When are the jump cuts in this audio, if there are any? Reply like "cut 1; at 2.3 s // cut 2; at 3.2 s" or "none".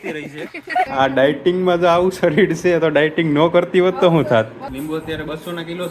cut 1; at 0.9 s // cut 2; at 4.6 s

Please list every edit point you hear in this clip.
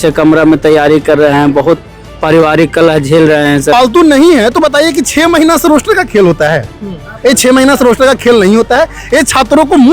cut 1; at 3.7 s

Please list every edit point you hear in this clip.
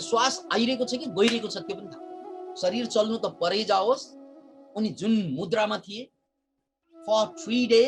none

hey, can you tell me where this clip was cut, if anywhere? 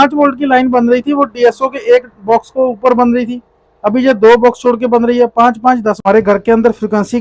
cut 1; at 6.0 s

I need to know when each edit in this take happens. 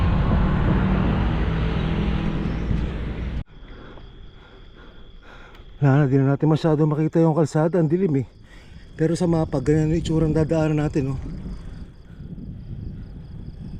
cut 1; at 3.4 s

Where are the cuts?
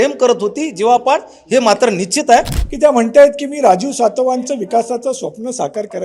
cut 1; at 2.6 s

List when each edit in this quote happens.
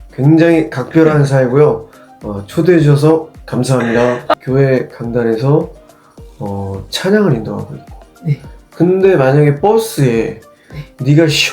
cut 1; at 4.3 s

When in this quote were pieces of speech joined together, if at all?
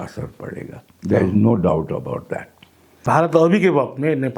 cut 1; at 3.0 s

